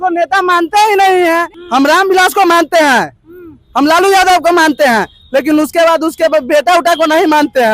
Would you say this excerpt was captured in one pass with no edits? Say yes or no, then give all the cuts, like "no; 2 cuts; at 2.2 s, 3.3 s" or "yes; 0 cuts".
no; 1 cut; at 1.5 s